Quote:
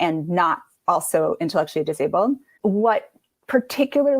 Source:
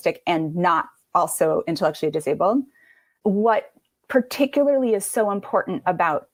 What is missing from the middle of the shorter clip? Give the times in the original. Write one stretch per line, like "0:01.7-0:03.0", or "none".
0:02.8-0:03.1